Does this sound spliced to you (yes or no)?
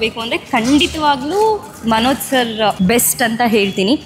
yes